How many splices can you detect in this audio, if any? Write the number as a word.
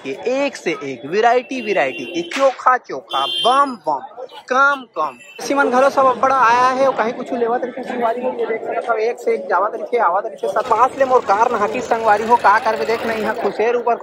two